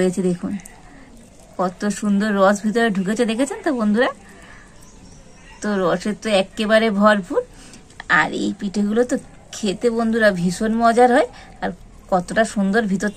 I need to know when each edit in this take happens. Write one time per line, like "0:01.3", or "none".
none